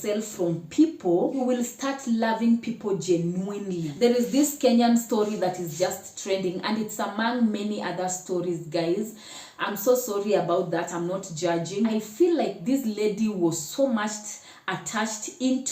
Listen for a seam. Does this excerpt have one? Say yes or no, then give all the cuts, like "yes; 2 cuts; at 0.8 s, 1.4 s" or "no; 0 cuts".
yes; 3 cuts; at 1.4 s, 3.9 s, 11.9 s